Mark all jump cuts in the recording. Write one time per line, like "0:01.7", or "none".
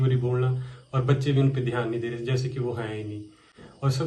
none